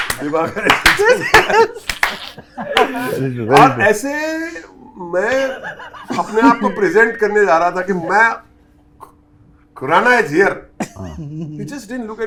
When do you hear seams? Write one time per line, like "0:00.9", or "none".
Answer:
none